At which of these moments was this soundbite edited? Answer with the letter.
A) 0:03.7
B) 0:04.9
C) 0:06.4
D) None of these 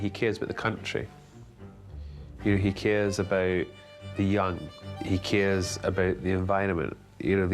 B